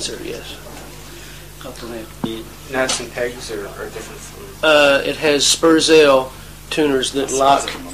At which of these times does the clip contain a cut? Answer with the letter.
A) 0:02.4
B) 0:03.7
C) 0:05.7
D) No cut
B